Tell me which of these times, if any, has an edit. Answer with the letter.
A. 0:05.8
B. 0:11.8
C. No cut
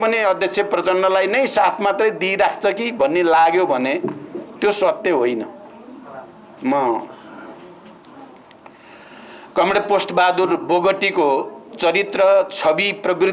C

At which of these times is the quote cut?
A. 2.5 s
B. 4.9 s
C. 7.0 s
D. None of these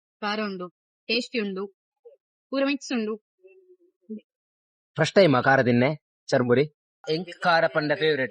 C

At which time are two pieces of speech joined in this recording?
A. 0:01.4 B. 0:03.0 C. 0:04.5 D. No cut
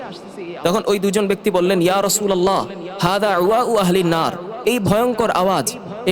C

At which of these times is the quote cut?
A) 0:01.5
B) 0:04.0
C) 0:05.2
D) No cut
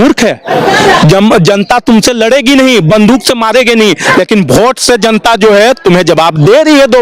D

